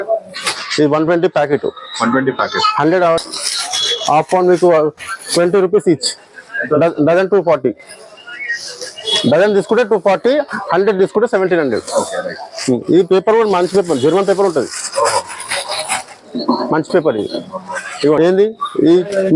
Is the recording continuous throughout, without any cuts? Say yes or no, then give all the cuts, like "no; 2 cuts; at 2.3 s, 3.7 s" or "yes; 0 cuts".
no; 2 cuts; at 3.2 s, 18.2 s